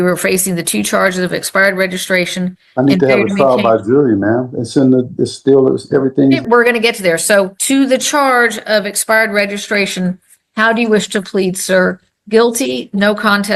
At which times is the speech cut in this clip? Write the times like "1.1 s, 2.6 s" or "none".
6.4 s, 7.6 s